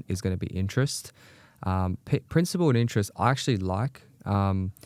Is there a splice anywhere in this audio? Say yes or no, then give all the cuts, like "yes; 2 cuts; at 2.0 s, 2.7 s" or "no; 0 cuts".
no; 0 cuts